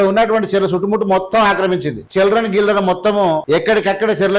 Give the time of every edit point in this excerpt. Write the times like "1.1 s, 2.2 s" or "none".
2.0 s, 3.4 s